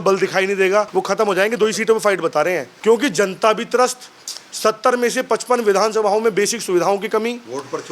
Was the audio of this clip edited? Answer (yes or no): yes